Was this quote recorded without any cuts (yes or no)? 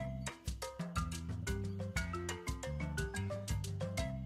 yes